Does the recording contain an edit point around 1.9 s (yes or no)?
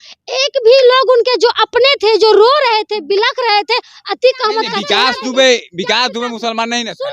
no